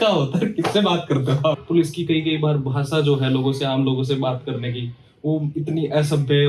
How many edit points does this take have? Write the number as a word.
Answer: one